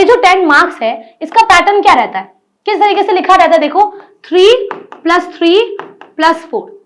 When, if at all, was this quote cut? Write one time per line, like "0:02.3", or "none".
none